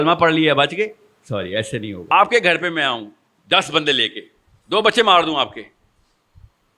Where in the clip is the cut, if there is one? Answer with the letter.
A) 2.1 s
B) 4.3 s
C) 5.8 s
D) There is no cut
A